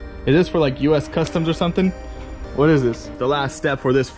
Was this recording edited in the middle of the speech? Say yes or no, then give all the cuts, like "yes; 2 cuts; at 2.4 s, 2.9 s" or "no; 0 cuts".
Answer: yes; 1 cut; at 3.1 s